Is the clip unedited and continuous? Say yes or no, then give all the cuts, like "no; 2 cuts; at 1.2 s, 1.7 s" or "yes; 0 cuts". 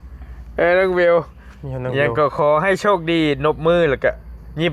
yes; 0 cuts